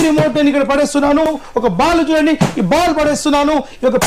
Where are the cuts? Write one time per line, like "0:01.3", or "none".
0:01.3